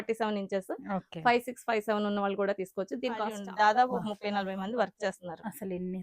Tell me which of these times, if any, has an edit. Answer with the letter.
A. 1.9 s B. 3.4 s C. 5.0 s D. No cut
B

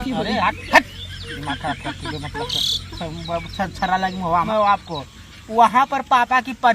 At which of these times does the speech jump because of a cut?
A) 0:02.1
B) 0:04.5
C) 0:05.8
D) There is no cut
B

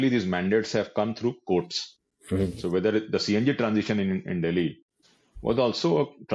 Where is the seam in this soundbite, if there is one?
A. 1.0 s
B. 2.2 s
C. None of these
C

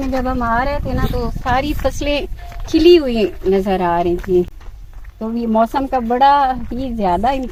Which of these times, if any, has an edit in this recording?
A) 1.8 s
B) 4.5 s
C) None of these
C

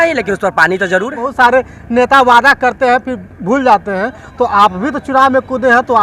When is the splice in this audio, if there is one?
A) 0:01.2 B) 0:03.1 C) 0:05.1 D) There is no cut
A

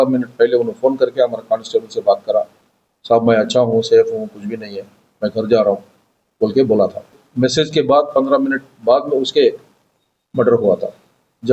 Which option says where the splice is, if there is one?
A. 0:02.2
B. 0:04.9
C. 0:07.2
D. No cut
C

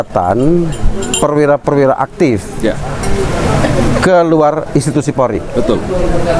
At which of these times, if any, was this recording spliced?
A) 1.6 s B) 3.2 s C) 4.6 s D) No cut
D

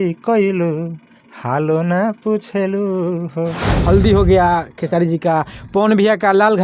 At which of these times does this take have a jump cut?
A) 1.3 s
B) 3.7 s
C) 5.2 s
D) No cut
B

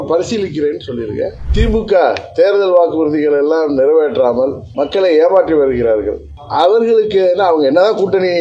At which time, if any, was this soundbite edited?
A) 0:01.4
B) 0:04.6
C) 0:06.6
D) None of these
A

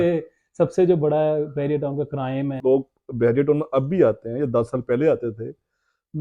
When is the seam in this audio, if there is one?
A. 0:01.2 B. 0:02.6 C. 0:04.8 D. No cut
B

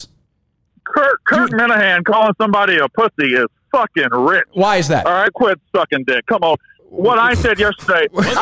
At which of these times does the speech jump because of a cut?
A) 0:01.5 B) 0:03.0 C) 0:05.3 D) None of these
C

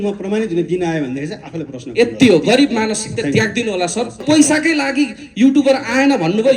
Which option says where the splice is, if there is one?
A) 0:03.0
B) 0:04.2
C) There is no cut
B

